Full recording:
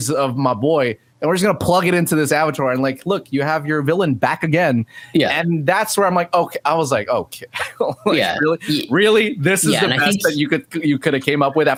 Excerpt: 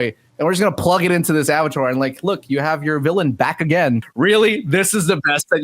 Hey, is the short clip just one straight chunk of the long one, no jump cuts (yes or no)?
no